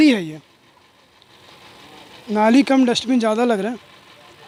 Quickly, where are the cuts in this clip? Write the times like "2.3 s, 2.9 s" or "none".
none